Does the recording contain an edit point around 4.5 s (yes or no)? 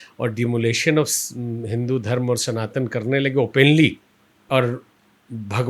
yes